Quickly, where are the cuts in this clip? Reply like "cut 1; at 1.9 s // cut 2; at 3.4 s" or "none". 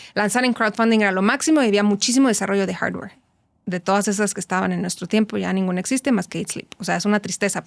none